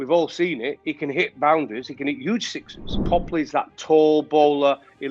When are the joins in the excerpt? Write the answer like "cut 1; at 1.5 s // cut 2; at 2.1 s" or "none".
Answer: cut 1; at 2.8 s